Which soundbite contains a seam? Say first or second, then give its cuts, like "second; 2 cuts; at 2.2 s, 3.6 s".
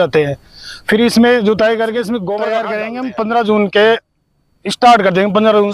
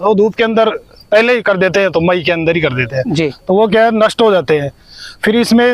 first; 1 cut; at 2.7 s